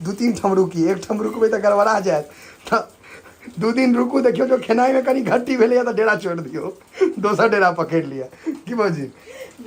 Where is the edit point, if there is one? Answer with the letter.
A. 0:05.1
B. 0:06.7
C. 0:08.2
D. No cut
D